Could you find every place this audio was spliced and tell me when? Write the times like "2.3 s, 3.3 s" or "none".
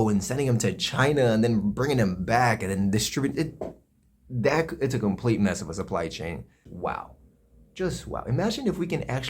6.7 s